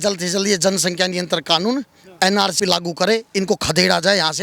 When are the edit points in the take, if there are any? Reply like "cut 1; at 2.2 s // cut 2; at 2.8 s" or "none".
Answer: cut 1; at 2.5 s